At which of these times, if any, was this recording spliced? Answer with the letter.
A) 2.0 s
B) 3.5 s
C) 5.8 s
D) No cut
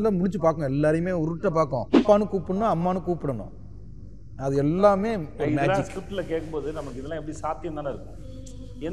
A